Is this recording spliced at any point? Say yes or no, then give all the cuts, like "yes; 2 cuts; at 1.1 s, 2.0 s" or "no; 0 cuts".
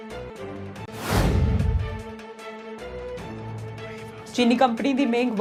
no; 0 cuts